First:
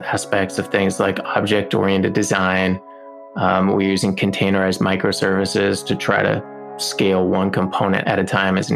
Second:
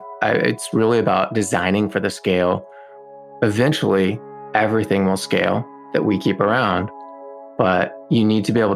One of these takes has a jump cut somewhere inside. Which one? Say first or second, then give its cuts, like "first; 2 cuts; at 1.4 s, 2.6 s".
first; 2 cuts; at 6.7 s, 8.0 s